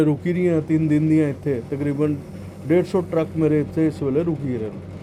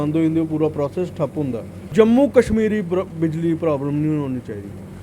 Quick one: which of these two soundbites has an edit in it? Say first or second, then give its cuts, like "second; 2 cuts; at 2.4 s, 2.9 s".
second; 1 cut; at 1.9 s